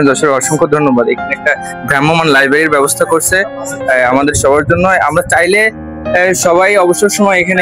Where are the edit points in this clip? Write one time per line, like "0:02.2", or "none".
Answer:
none